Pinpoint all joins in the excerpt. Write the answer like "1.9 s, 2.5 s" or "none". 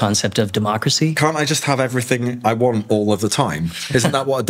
1.2 s